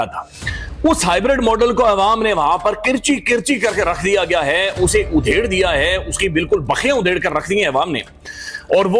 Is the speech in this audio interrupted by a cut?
no; 0 cuts

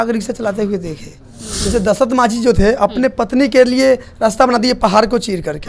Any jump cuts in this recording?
yes; 1 cut; at 1.5 s

